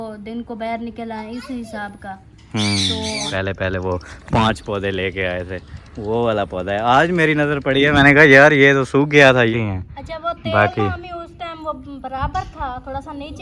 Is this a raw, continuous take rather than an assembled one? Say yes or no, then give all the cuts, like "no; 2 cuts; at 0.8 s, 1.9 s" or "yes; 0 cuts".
no; 2 cuts; at 3.3 s, 9.5 s